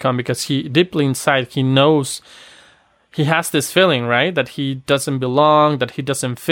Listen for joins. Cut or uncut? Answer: uncut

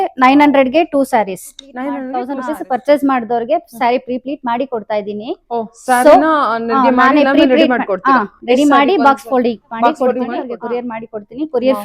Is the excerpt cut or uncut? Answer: cut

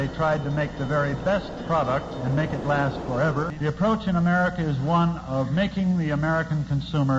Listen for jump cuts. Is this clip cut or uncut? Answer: cut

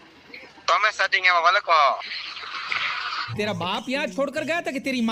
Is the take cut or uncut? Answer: uncut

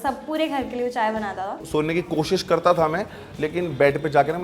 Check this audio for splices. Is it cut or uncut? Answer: cut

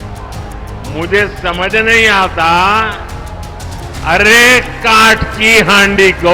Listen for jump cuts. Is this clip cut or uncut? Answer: cut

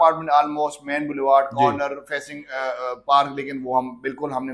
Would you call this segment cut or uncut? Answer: uncut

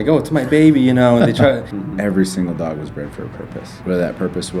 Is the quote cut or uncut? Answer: cut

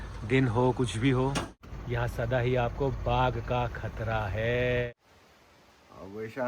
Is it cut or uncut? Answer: cut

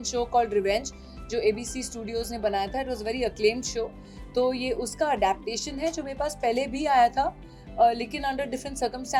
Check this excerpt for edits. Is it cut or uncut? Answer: uncut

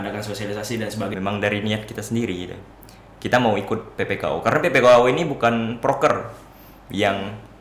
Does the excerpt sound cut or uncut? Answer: cut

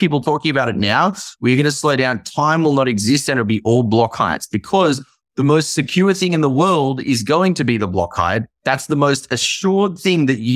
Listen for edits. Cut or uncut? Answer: uncut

